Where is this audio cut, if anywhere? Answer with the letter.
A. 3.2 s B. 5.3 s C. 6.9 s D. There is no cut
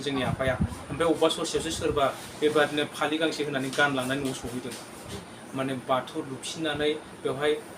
B